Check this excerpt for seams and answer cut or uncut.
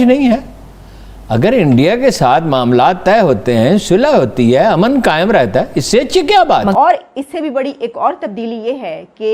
cut